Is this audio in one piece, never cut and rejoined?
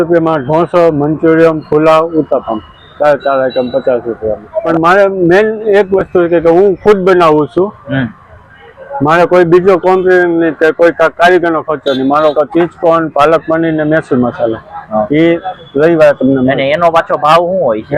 no; 2 cuts; at 4.7 s, 12.3 s

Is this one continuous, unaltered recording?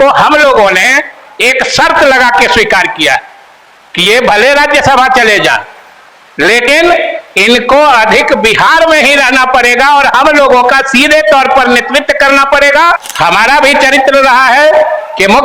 no; 1 cut; at 13.0 s

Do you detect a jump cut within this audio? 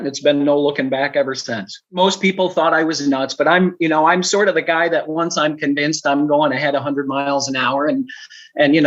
yes; 1 cut; at 1.8 s

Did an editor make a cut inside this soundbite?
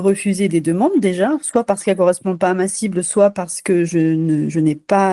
no; 0 cuts

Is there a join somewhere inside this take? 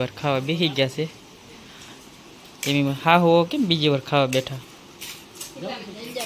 no; 0 cuts

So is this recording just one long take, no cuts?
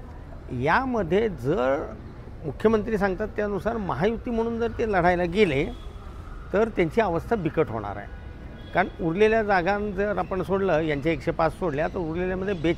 yes; 0 cuts

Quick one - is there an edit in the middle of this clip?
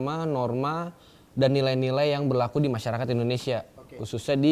no; 0 cuts

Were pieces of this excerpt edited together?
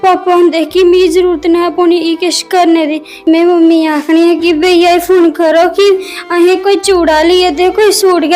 yes; 1 cut; at 3.3 s

